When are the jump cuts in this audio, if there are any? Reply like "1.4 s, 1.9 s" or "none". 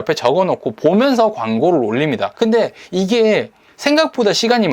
2.3 s